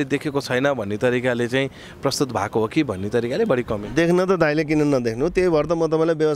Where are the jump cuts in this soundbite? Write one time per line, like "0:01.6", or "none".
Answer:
none

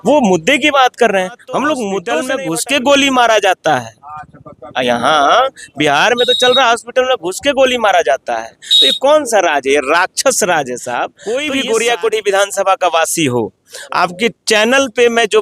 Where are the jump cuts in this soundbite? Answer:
0:02.2
0:11.1

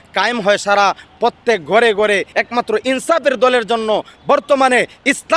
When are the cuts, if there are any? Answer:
0:02.3

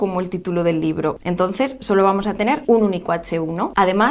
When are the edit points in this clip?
0:01.6
0:03.0

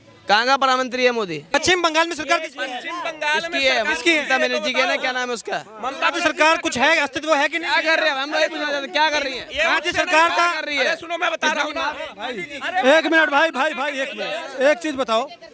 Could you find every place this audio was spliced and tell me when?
0:01.5

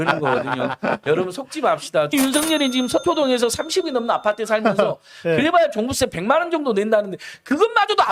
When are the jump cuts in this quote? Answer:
0:02.1

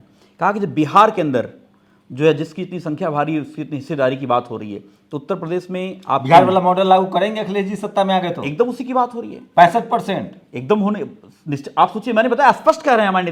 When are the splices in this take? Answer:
none

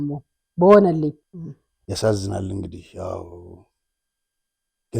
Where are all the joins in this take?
none

